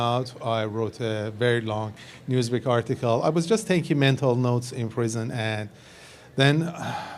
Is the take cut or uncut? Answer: uncut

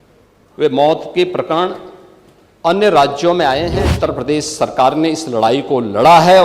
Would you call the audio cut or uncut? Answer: cut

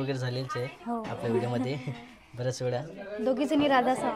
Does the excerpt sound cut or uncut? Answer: uncut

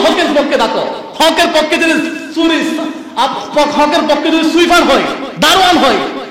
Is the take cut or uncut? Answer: uncut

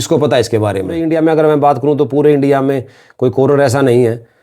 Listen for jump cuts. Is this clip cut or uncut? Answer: cut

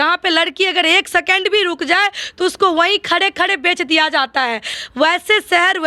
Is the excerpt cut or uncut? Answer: cut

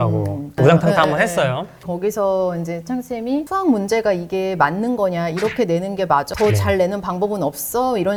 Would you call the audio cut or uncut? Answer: uncut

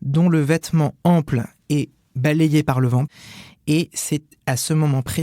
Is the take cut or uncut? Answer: cut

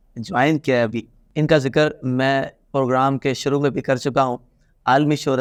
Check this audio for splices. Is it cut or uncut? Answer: uncut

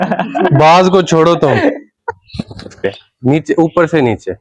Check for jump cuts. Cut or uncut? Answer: cut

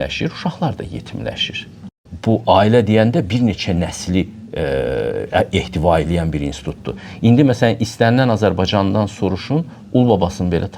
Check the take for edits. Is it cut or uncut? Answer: cut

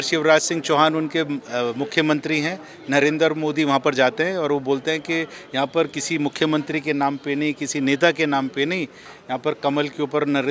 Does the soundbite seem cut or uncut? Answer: uncut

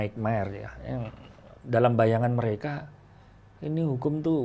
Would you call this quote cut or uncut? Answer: uncut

